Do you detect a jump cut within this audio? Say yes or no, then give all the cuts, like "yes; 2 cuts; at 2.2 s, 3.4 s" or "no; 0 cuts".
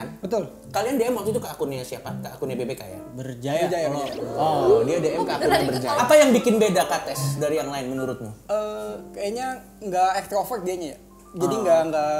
yes; 2 cuts; at 5.9 s, 8.3 s